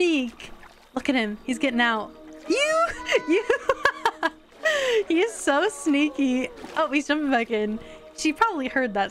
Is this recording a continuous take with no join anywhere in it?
yes; 0 cuts

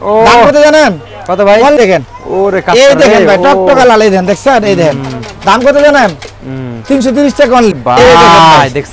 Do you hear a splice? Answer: yes; 2 cuts; at 1.8 s, 7.7 s

